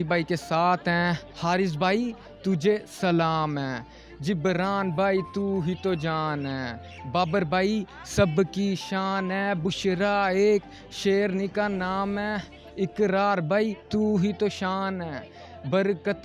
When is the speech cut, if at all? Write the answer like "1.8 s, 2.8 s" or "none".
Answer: 1.3 s